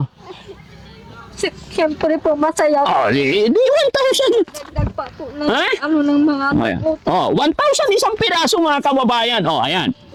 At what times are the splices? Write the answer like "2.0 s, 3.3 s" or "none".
none